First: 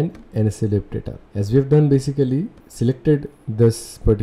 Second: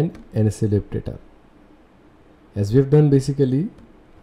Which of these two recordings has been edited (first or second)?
first